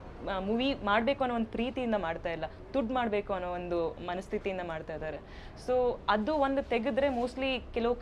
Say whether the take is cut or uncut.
uncut